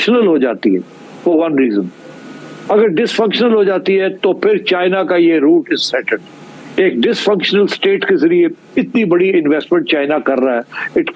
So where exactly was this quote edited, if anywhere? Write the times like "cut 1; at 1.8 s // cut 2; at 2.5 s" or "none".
none